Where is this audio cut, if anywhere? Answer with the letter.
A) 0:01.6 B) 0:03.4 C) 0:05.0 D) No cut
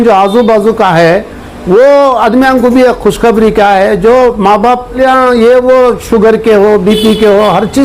C